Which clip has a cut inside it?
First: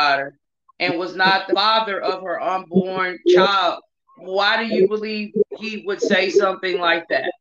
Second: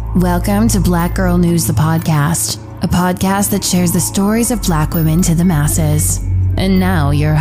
first; 1 cut; at 1.5 s

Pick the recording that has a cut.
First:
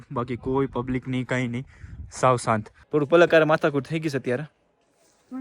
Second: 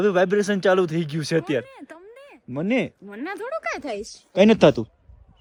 first; 1 cut; at 2.8 s

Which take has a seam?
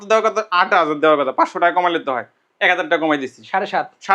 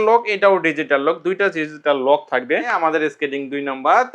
second; 1 cut; at 2.9 s

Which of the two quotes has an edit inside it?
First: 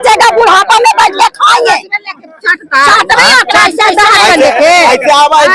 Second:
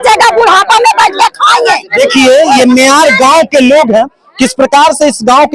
second; 1 cut; at 1.9 s

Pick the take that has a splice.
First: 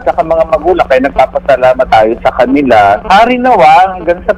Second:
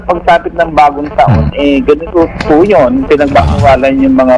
first; 2 cuts; at 1.9 s, 3.0 s

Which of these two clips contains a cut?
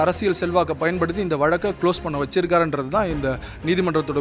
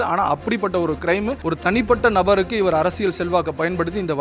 second; 1 cut; at 1.4 s

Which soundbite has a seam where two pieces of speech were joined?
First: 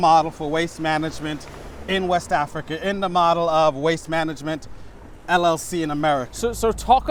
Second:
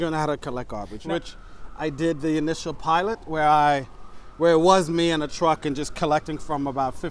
second; 1 cut; at 1.0 s

